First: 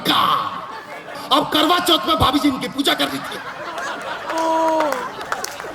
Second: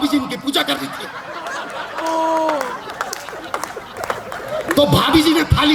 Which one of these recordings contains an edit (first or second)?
first